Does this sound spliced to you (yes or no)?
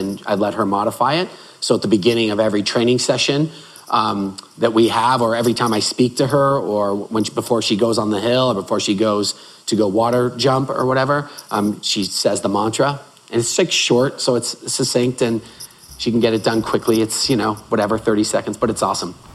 no